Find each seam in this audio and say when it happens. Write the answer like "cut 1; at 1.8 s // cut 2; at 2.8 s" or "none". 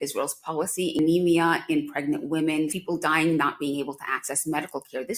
cut 1; at 1.0 s // cut 2; at 2.8 s